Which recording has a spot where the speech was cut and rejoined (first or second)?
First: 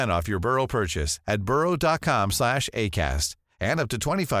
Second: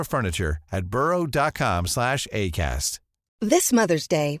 second